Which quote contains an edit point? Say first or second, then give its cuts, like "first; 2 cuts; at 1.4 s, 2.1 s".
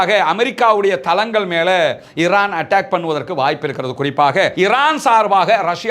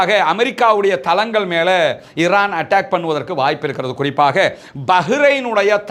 first; 1 cut; at 4.5 s